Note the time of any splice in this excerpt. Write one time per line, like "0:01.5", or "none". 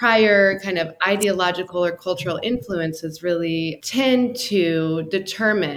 0:03.8